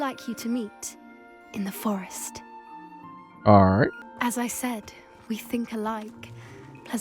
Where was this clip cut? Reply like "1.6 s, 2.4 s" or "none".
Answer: 4.1 s